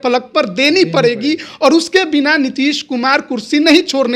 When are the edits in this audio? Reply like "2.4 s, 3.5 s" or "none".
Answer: none